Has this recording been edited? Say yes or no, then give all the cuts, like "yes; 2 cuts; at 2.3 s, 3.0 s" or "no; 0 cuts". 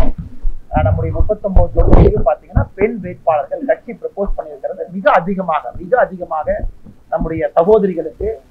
no; 0 cuts